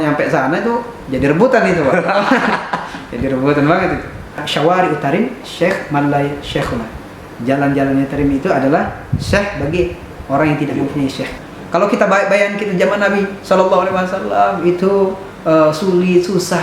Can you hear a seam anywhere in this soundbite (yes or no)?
yes